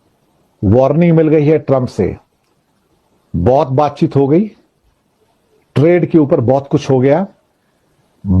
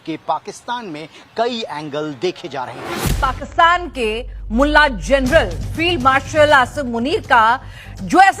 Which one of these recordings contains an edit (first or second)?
second